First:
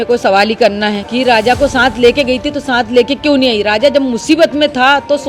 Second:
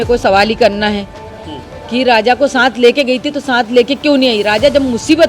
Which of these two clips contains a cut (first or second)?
first